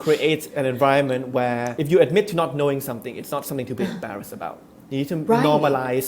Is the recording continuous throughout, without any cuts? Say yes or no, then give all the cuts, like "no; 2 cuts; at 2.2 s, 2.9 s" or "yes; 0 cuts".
no; 1 cut; at 1.7 s